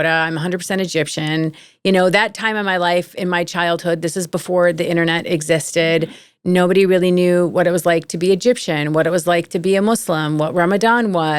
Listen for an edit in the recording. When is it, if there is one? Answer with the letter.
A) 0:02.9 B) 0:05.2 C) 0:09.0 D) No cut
D